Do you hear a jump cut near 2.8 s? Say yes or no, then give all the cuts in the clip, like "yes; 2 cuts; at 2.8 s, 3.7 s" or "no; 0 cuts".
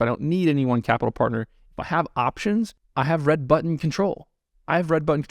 yes; 1 cut; at 2.8 s